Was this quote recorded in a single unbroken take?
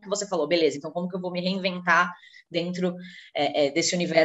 yes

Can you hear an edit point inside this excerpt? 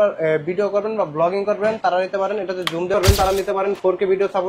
yes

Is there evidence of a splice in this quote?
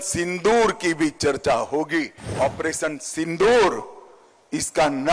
yes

